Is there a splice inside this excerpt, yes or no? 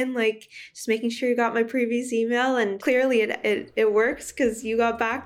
yes